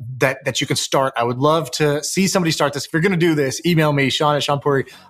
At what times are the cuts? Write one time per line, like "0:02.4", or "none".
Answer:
none